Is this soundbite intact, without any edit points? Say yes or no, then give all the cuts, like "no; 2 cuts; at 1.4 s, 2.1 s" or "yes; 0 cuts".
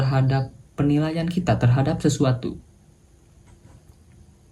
yes; 0 cuts